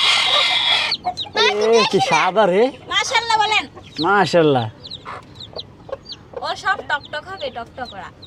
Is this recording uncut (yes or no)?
yes